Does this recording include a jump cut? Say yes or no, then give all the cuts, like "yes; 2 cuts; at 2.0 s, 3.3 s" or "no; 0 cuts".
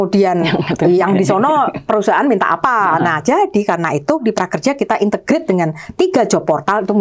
yes; 1 cut; at 4.2 s